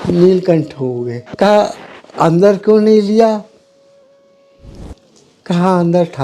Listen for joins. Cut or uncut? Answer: cut